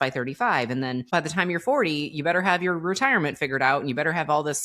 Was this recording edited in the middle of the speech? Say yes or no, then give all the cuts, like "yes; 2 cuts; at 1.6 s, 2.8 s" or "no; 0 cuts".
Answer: yes; 1 cut; at 1.1 s